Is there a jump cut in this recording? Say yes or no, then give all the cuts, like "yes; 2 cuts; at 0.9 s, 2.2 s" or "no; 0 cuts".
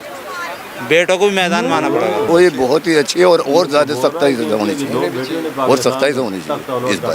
yes; 1 cut; at 2.1 s